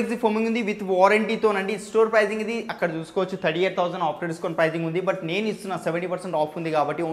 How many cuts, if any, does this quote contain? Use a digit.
0